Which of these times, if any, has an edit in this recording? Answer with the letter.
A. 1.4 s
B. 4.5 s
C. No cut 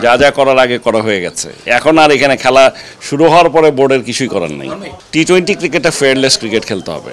C